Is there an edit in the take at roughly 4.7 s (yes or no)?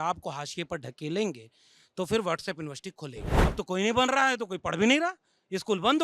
no